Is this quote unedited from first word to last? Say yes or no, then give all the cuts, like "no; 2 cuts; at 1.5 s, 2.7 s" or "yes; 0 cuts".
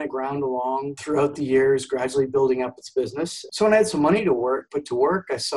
no; 1 cut; at 3.4 s